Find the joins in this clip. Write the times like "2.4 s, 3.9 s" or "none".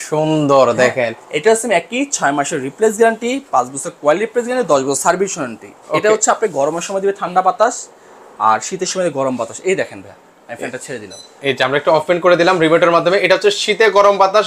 none